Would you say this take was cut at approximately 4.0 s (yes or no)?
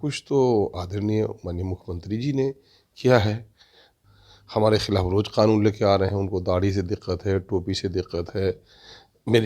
yes